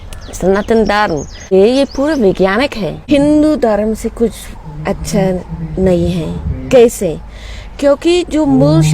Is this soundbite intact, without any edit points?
no; 2 cuts; at 1.5 s, 2.9 s

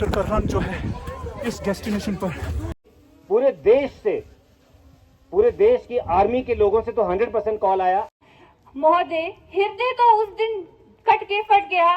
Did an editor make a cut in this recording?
yes; 2 cuts; at 2.9 s, 8.1 s

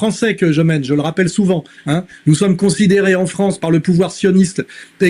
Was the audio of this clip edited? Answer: no; 0 cuts

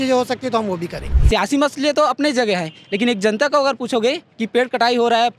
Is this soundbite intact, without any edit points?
no; 1 cut; at 1.2 s

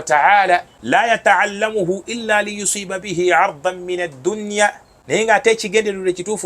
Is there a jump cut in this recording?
yes; 2 cuts; at 1.0 s, 5.2 s

